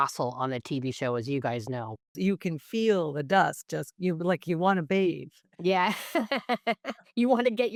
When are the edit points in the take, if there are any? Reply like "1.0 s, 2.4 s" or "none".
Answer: none